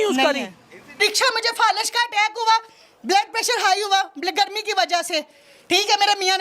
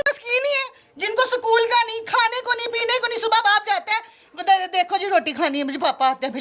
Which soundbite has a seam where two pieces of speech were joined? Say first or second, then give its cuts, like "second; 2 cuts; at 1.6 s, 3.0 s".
first; 1 cut; at 1.0 s